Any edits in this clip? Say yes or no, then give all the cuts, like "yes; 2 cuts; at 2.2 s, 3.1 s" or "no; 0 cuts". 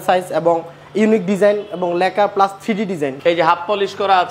yes; 1 cut; at 3.2 s